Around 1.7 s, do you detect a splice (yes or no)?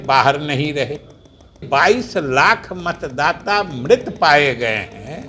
yes